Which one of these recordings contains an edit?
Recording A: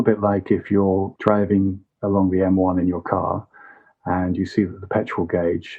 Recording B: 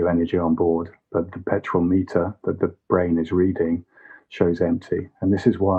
A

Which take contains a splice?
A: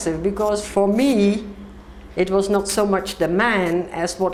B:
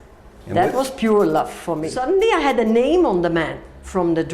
B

